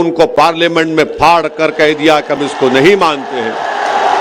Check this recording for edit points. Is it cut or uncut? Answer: uncut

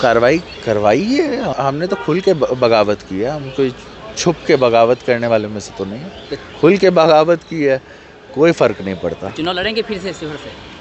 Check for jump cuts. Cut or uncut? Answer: cut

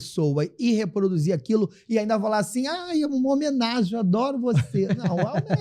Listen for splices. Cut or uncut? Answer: uncut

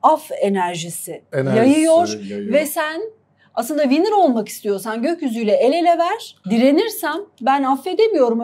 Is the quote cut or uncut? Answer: cut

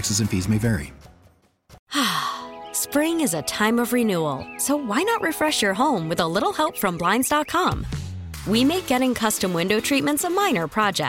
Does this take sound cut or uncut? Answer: cut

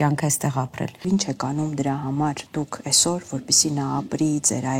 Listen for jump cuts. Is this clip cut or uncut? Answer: cut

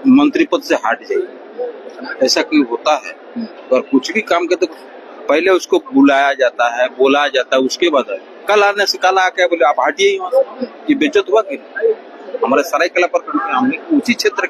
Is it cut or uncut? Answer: uncut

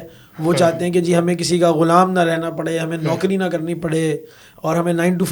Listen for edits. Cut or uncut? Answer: uncut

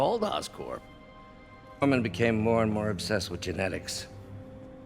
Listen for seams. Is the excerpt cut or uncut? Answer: cut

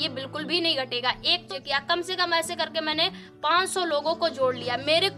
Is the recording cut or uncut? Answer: cut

